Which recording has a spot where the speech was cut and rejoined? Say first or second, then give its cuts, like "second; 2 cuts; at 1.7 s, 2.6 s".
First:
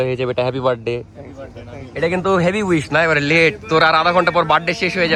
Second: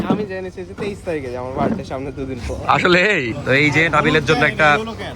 second; 1 cut; at 3.3 s